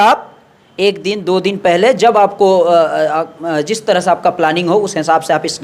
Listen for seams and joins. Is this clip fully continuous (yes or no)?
yes